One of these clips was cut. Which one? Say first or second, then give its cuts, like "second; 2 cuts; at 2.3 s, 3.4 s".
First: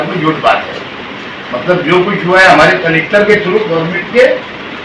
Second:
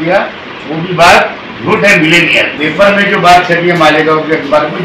second; 1 cut; at 2.5 s